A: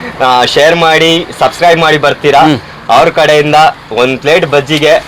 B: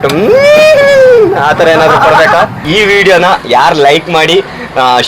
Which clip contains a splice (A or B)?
B